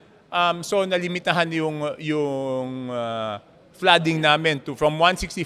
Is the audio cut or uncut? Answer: uncut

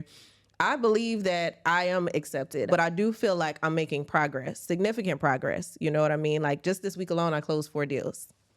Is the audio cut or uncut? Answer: cut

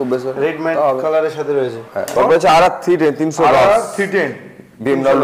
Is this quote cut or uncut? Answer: cut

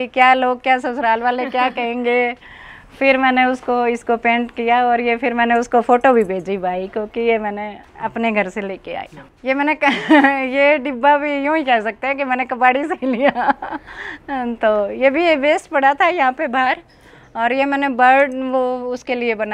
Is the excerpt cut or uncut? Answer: uncut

